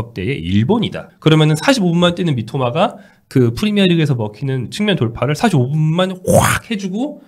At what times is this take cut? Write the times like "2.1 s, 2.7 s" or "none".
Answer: 1.0 s